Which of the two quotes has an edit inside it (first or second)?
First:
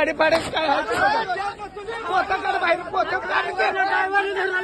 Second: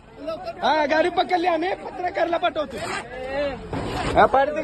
second